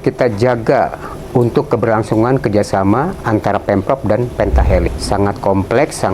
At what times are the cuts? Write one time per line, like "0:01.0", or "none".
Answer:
0:04.9